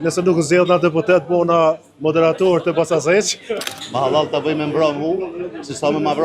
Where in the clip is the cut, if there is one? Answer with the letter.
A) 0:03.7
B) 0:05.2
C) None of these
A